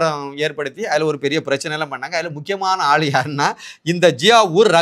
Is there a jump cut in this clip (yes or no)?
no